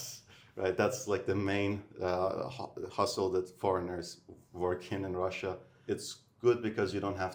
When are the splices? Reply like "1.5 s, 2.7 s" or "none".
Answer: none